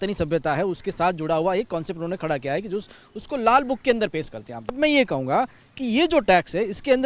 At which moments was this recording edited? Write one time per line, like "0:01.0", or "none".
0:04.8